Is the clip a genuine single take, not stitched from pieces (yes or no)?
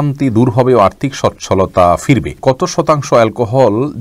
no